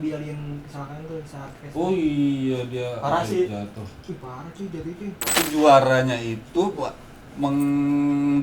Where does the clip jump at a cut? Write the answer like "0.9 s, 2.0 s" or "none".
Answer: 5.4 s